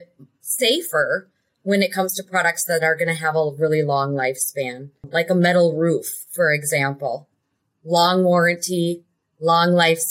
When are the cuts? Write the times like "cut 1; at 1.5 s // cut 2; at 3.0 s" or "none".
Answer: cut 1; at 5.1 s

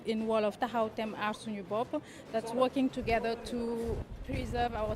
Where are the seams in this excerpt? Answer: cut 1; at 4.0 s

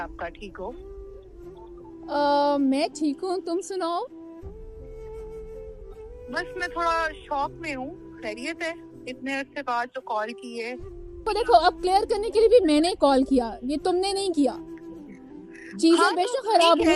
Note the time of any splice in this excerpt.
cut 1; at 4.7 s // cut 2; at 6.3 s // cut 3; at 11.2 s

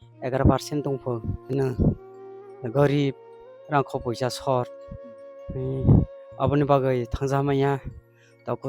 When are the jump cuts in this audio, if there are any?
cut 1; at 1.5 s

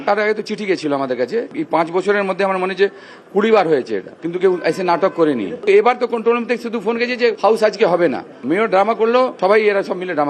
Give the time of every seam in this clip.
cut 1; at 1.5 s // cut 2; at 7.4 s // cut 3; at 9.3 s

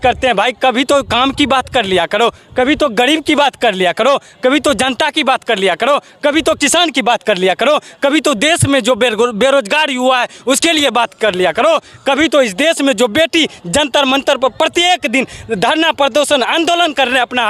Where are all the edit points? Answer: none

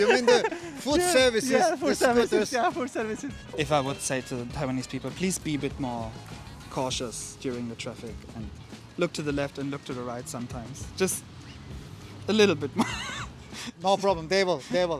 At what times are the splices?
cut 1; at 3.4 s

